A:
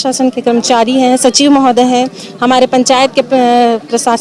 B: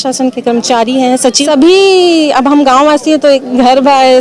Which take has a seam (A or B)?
B